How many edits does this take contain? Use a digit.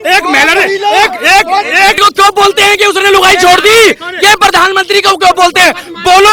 1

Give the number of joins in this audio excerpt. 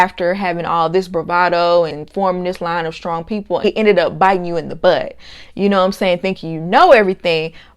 2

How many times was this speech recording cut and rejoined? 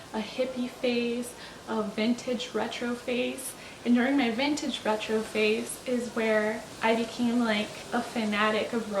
2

